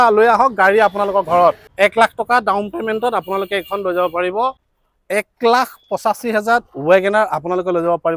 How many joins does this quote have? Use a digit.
2